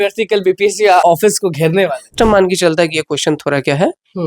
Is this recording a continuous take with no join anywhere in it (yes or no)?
no